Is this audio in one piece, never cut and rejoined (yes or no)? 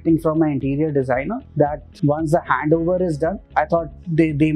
no